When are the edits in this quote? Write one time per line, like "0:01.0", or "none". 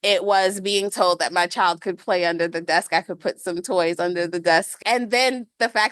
0:04.8